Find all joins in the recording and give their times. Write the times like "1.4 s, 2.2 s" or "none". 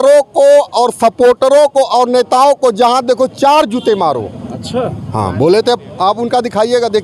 none